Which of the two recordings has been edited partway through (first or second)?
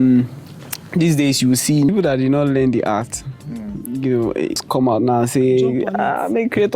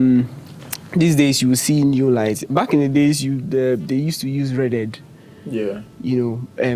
first